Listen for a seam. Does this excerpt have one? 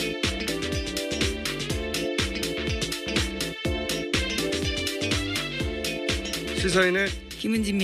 yes; 1 cut; at 5.6 s

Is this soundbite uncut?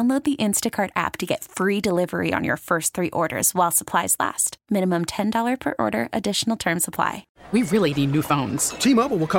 no; 1 cut; at 7.3 s

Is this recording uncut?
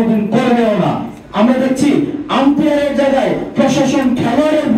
no; 1 cut; at 1.1 s

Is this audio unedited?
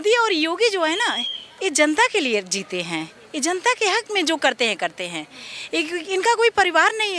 yes; 0 cuts

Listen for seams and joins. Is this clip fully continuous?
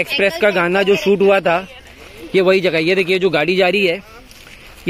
yes; 0 cuts

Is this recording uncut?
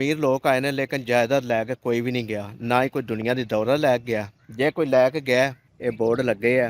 no; 1 cut; at 5.7 s

